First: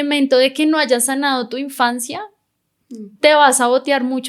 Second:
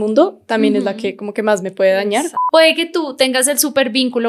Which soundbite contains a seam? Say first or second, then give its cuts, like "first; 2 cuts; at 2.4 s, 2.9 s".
second; 1 cut; at 2.4 s